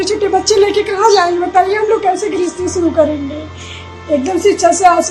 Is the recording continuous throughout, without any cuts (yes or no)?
yes